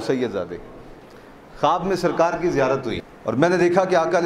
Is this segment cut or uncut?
cut